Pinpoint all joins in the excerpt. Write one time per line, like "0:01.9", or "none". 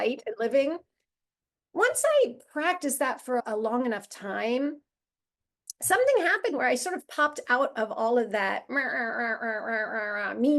0:03.4